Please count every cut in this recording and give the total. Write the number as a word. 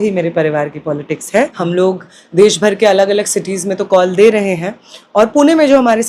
one